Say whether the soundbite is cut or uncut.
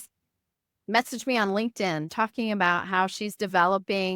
cut